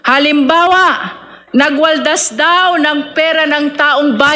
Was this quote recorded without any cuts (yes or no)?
yes